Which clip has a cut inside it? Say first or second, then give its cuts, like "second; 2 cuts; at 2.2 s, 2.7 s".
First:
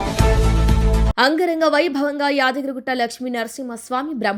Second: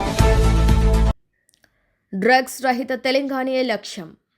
second; 1 cut; at 1.1 s